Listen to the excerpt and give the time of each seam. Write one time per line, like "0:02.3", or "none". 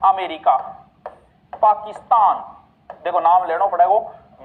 none